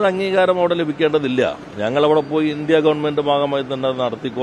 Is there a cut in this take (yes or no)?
no